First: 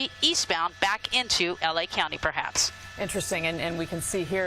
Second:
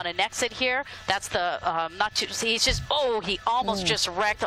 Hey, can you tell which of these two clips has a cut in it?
first; 1 cut; at 2.5 s

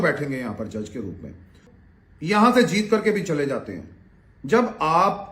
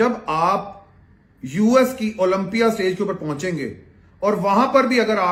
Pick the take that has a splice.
first; 1 cut; at 1.6 s

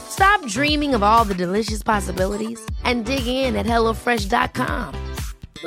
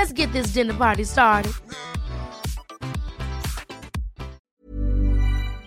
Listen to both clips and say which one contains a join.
second; 1 cut; at 4.5 s

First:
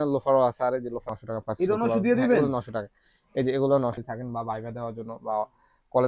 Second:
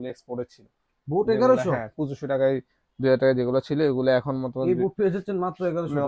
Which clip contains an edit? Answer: first; 2 cuts; at 1.1 s, 4.0 s

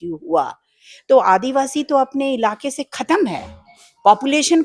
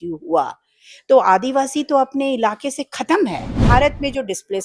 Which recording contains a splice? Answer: second; 1 cut; at 3.6 s

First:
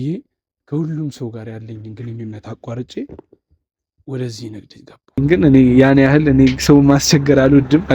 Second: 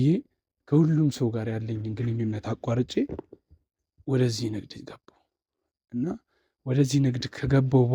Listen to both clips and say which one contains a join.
first; 1 cut; at 5.2 s

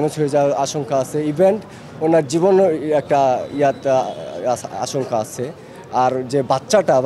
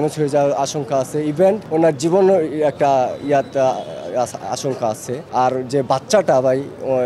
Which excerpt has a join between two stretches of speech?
second; 2 cuts; at 1.6 s, 5.2 s

